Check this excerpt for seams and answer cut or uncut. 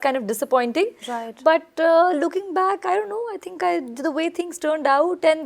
uncut